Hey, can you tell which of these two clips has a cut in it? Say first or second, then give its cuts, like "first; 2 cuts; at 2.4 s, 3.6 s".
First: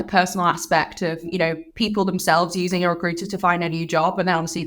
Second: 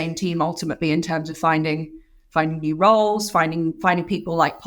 first; 1 cut; at 1.3 s